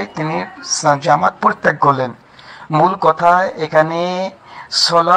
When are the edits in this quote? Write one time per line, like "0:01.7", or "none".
none